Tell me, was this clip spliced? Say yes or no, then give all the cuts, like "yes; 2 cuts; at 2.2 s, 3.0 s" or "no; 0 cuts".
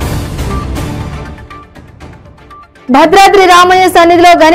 yes; 2 cuts; at 1.1 s, 2.6 s